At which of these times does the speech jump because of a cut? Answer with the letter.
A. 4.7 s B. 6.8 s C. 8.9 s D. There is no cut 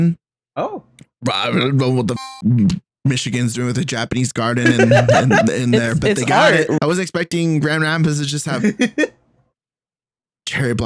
B